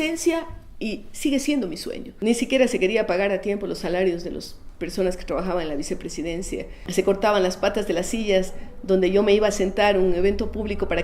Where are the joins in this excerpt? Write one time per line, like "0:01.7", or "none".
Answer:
0:02.1
0:06.8